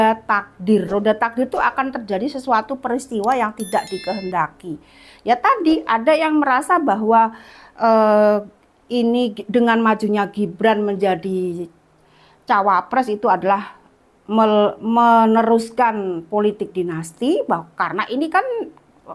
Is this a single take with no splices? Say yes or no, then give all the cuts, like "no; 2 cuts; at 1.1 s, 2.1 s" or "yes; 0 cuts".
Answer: yes; 0 cuts